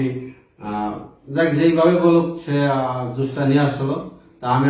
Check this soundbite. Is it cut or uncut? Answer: uncut